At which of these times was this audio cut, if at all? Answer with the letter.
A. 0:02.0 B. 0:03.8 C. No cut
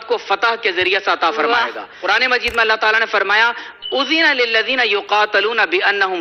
A